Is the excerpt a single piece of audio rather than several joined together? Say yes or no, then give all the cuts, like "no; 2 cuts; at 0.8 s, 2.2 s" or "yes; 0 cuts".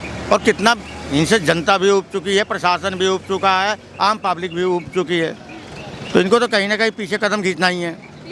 yes; 0 cuts